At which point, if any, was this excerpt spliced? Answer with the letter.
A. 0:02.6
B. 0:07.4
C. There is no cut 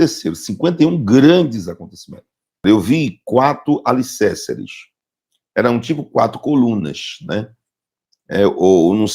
A